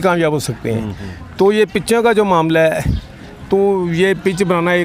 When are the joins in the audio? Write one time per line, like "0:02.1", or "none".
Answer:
none